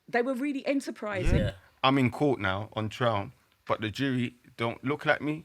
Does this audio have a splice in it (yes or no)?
yes